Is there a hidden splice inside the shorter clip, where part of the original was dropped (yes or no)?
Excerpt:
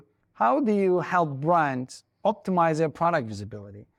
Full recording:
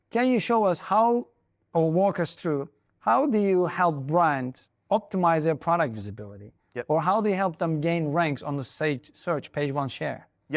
no